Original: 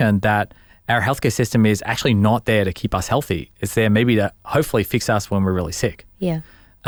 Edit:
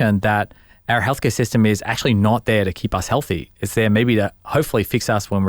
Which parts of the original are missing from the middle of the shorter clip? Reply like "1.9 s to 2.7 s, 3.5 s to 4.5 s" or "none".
none

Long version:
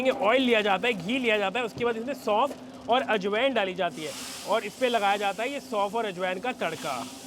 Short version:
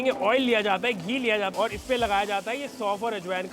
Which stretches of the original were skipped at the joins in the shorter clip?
1.5 s to 4.4 s

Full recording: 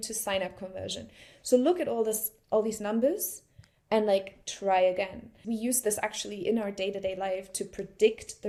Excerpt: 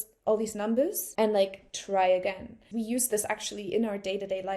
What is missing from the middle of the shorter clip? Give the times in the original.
3.3 s to 3.8 s

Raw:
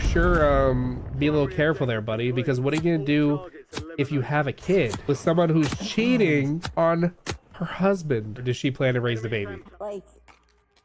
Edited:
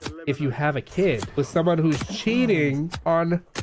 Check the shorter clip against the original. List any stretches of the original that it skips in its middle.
none

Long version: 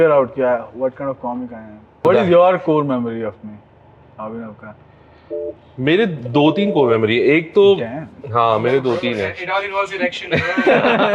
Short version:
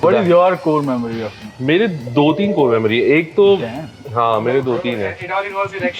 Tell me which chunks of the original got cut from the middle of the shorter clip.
3.5 s to 5.6 s

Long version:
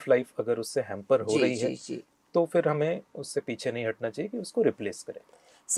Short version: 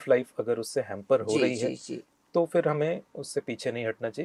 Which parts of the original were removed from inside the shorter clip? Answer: none

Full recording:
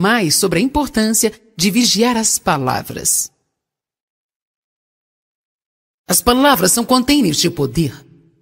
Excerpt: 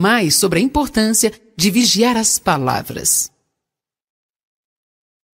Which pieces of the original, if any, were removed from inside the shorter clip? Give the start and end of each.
none

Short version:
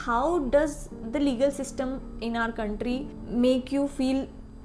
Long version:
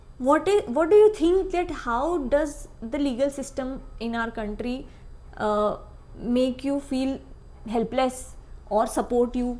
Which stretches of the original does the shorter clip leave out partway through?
4.9 s to 6.1 s

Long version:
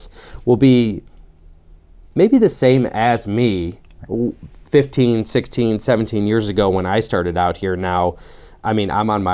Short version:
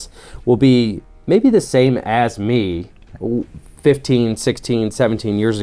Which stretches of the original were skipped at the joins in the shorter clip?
1.1 s to 2.0 s

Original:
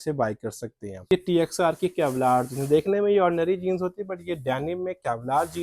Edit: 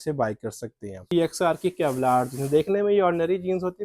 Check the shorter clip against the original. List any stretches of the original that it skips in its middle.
1.0 s to 1.2 s

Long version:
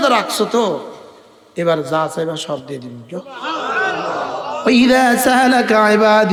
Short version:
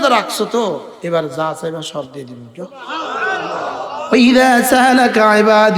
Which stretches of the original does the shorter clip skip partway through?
0.9 s to 1.5 s

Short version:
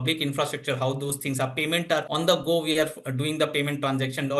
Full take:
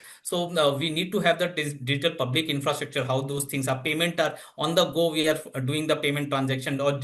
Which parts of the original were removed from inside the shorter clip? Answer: 4.4 s to 4.6 s

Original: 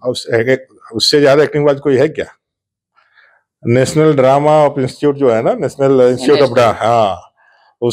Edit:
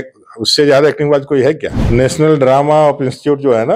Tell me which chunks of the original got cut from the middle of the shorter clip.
2.3 s to 3.5 s

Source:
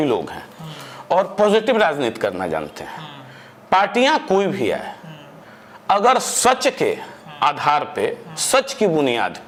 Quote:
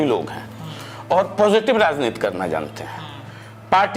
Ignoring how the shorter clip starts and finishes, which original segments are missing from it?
none

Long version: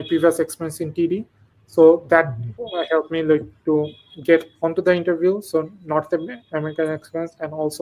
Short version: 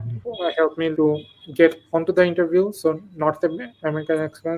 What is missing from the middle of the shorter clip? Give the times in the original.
3.2 s to 3.6 s

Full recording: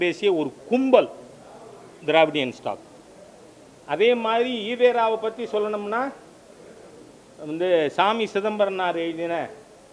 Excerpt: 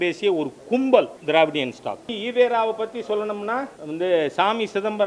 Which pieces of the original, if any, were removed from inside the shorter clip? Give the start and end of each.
1.2 s to 2.0 s, 3.0 s to 4.6 s, 6.2 s to 7.4 s

